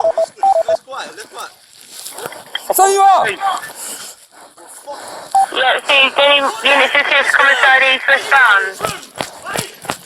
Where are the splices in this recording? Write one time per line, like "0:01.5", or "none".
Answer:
0:02.8
0:09.0